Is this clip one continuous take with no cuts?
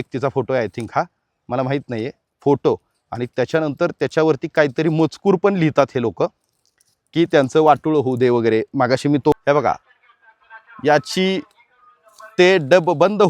no; 1 cut; at 9.3 s

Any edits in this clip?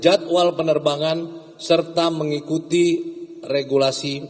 no; 0 cuts

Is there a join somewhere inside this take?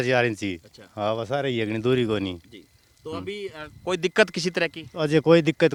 no; 0 cuts

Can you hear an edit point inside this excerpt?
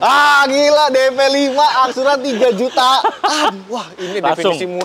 no; 0 cuts

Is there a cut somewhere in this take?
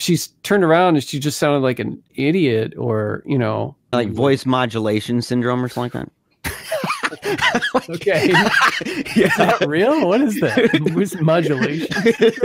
yes; 2 cuts; at 2.0 s, 3.9 s

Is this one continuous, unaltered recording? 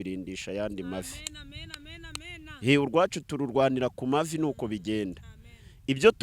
yes; 0 cuts

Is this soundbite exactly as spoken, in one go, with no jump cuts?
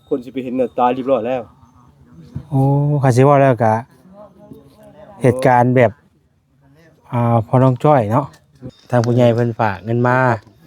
no; 1 cut; at 8.7 s

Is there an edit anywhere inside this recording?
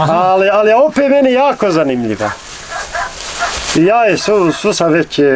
no; 0 cuts

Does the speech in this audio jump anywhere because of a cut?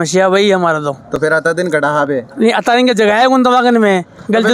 no; 0 cuts

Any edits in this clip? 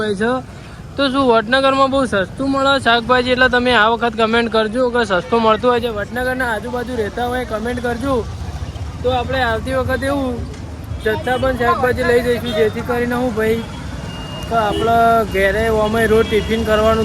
no; 0 cuts

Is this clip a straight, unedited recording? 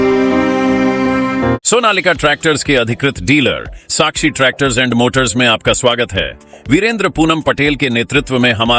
no; 1 cut; at 1.6 s

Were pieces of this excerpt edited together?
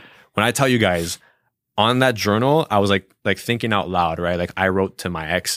no; 0 cuts

